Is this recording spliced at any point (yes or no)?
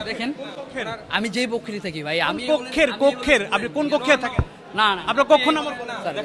no